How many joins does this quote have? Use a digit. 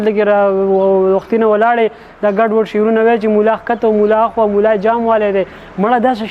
0